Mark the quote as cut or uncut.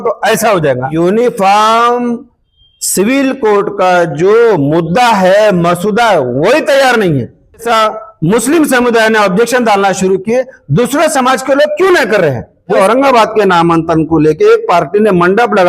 cut